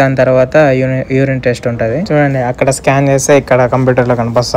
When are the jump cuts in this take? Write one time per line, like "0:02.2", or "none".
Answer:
none